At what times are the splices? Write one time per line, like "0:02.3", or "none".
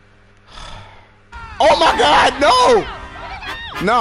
0:01.6